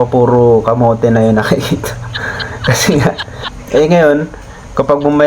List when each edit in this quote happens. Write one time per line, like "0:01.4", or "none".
0:03.5

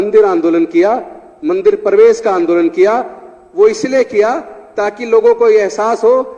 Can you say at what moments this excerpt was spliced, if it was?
none

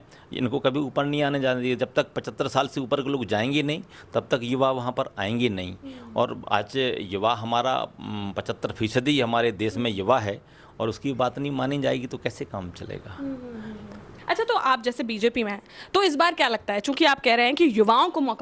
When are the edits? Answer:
none

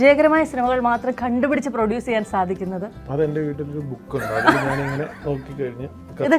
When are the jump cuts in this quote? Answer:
none

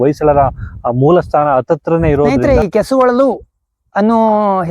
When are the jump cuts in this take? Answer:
0:02.4

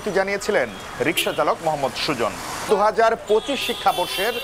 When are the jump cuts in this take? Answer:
0:02.7

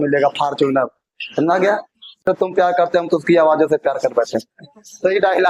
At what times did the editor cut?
0:02.2

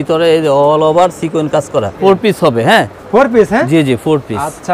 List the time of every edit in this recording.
0:02.0

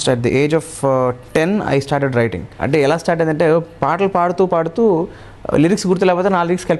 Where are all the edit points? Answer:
0:02.6

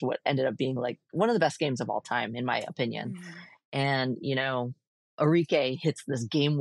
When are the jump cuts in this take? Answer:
none

